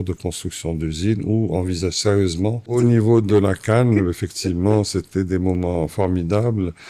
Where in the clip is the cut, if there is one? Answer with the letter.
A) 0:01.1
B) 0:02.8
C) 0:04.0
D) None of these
B